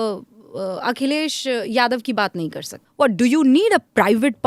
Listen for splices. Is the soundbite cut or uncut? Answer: cut